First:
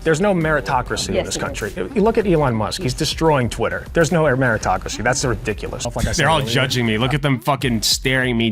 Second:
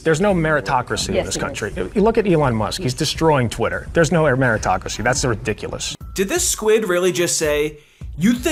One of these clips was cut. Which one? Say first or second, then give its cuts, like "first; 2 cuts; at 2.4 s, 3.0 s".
first; 1 cut; at 5.8 s